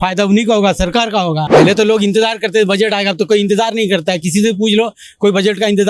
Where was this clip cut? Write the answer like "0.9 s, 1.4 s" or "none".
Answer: 1.4 s

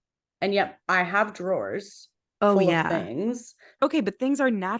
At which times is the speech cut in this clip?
3.7 s

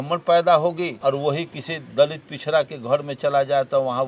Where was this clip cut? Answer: 0.9 s

